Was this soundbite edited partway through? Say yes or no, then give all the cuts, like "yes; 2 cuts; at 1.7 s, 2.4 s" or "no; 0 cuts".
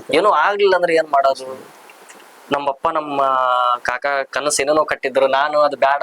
no; 0 cuts